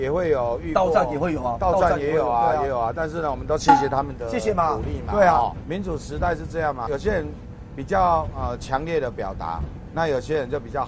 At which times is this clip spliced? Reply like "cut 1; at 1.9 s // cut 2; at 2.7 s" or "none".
cut 1; at 5.6 s // cut 2; at 6.9 s